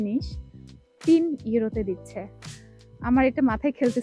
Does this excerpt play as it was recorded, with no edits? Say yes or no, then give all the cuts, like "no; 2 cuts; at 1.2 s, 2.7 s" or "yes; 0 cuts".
yes; 0 cuts